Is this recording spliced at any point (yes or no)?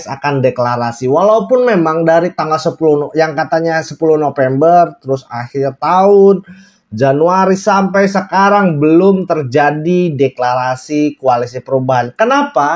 no